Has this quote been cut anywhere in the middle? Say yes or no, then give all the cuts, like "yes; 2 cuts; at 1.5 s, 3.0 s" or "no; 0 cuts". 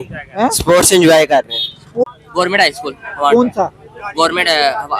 yes; 1 cut; at 2.0 s